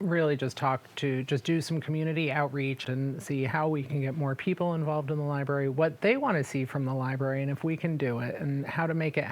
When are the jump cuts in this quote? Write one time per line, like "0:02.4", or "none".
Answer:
0:02.8
0:03.9